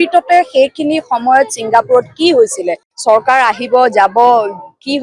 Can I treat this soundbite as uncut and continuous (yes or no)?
no